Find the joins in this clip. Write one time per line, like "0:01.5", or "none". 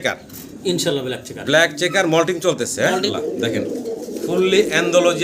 0:03.1